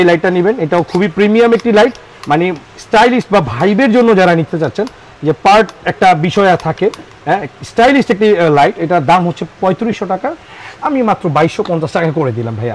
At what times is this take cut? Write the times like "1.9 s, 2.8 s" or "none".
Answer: none